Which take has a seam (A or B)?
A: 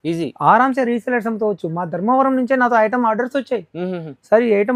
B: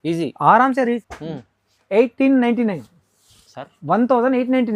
B